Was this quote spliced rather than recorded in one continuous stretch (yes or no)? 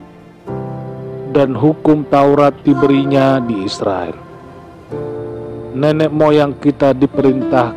yes